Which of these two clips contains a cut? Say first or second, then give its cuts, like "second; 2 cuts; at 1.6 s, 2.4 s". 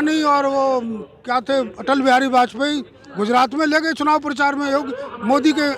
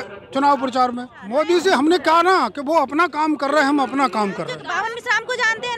second; 2 cuts; at 1.1 s, 4.6 s